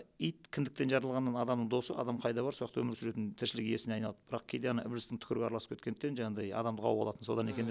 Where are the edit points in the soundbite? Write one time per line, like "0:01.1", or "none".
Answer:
none